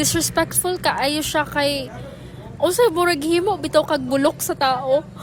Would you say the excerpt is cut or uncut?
uncut